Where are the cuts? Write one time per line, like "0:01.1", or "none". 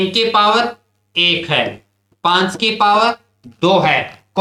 none